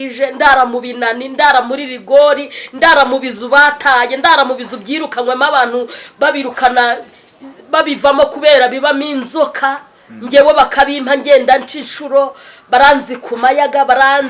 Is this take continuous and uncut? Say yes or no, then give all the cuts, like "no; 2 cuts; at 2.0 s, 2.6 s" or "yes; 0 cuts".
yes; 0 cuts